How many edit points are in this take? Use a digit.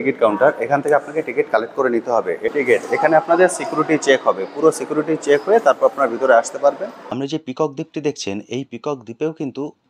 2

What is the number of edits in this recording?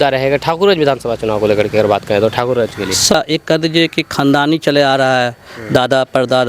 1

